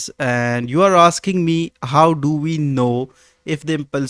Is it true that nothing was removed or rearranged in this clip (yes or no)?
yes